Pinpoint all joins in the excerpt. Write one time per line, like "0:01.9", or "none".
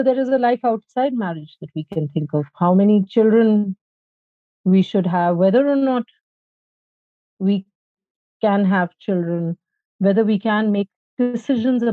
none